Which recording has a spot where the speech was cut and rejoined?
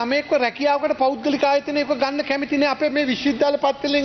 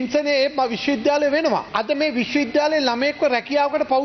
second; 1 cut; at 1.7 s

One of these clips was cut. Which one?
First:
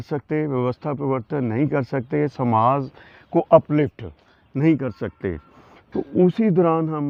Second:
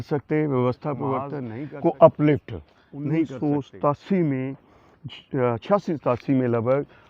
second; 2 cuts; at 1.4 s, 3.3 s

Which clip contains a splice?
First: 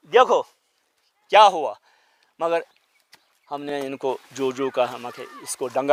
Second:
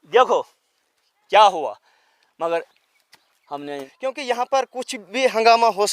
second; 1 cut; at 3.7 s

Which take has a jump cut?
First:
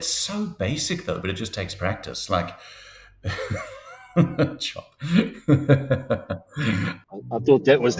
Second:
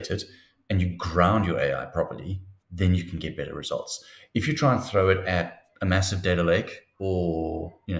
first; 1 cut; at 7.0 s

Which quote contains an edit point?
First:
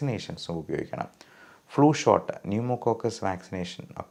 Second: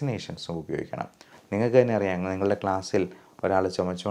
second; 1 cut; at 1.3 s

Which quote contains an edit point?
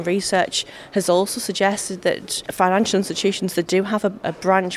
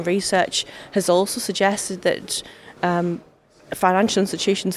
first; 1 cut; at 2.4 s

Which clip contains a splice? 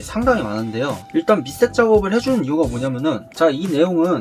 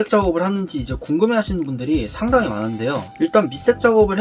first; 1 cut; at 3.3 s

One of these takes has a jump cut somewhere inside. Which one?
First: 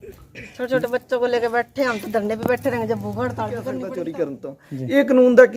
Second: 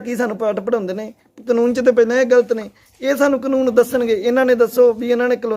first; 1 cut; at 3.9 s

